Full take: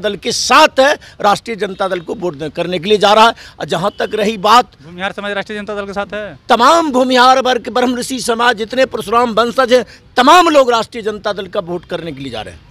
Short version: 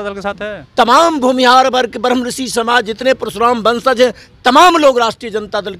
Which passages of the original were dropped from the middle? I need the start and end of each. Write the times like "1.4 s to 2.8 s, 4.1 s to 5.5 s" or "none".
none